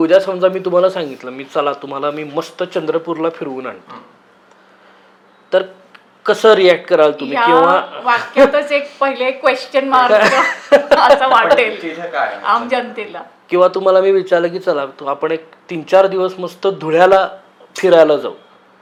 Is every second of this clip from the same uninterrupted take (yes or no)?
yes